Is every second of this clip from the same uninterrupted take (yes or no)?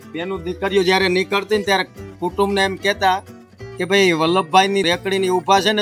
yes